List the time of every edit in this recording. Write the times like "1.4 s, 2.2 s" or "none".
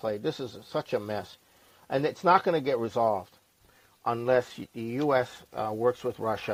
none